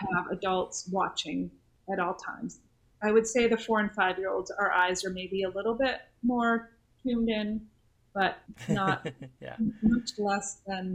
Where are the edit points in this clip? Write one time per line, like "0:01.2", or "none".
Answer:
0:01.8
0:08.4